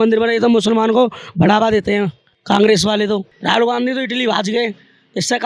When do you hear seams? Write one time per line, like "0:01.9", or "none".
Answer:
0:03.3